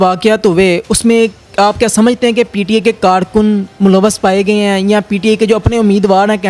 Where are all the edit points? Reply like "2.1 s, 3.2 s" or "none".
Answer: none